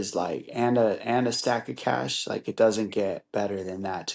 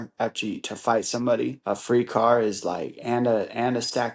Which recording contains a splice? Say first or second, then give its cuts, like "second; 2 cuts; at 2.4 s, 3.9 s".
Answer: second; 1 cut; at 1.6 s